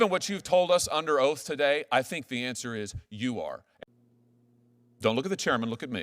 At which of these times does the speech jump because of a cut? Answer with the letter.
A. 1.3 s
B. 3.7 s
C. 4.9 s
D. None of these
B